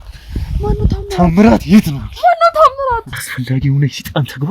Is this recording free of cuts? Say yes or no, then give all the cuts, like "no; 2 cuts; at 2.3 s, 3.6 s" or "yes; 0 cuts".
no; 1 cut; at 3.3 s